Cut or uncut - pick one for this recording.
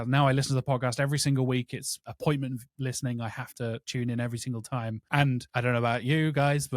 cut